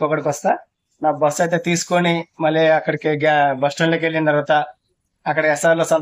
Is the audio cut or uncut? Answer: uncut